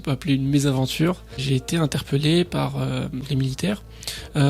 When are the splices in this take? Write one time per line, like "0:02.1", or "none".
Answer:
0:01.3
0:03.3